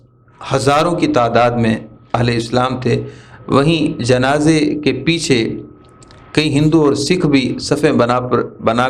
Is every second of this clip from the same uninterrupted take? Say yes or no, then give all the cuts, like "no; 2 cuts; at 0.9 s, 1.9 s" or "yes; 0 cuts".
yes; 0 cuts